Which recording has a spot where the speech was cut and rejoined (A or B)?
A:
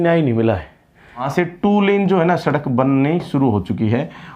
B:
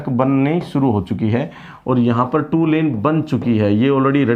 A